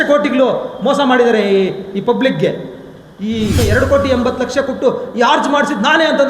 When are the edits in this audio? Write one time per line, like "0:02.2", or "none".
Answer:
0:03.6

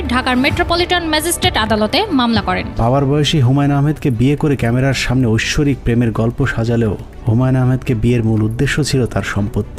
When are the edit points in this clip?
0:02.7

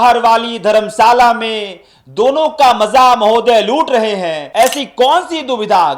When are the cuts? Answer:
0:04.4

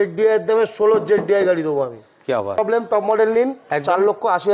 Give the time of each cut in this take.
0:02.6

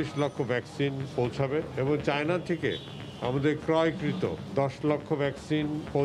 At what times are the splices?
none

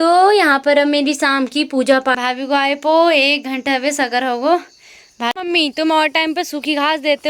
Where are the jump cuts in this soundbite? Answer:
0:02.2
0:05.3

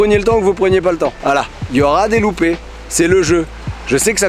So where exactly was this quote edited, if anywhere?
none

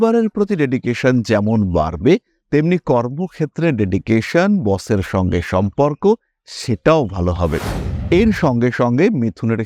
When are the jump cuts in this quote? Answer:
0:07.8

